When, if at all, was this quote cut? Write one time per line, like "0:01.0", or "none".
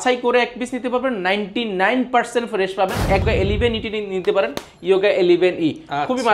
0:03.2